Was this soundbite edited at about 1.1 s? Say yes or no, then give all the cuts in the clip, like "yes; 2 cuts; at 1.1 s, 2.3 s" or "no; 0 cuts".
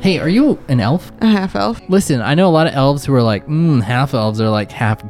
yes; 2 cuts; at 1.1 s, 1.8 s